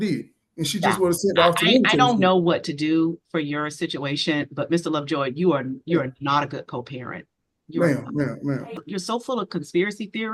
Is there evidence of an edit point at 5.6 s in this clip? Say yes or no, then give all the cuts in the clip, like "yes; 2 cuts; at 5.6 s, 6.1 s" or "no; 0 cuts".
no; 1 cut; at 8.7 s